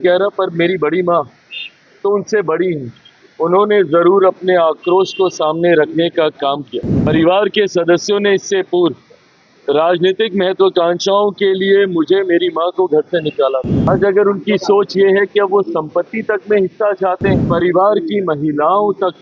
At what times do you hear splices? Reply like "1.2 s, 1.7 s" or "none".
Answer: 6.9 s, 13.9 s, 17.4 s

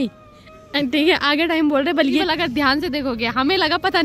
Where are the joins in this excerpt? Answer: 2.2 s

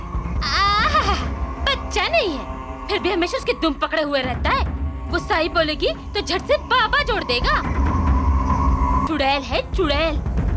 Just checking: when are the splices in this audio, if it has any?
9.1 s

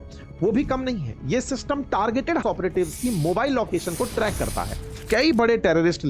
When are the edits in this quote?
2.4 s, 5.0 s

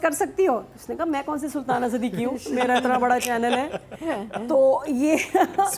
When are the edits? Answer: none

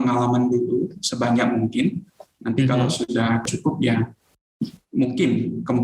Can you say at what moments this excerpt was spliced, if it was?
3.4 s

